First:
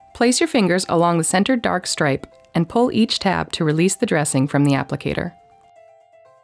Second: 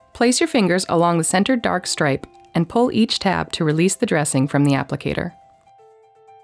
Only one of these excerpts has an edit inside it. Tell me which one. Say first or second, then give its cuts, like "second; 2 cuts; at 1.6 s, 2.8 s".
second; 1 cut; at 5.3 s